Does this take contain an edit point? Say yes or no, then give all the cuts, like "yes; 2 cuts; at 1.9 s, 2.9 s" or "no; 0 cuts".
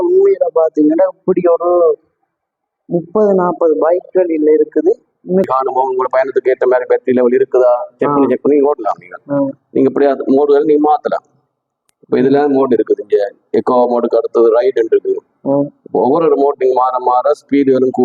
yes; 1 cut; at 5.5 s